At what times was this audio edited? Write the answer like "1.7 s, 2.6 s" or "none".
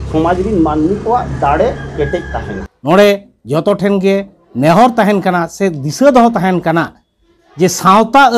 2.5 s